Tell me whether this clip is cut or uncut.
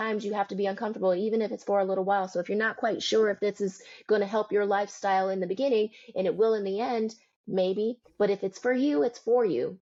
uncut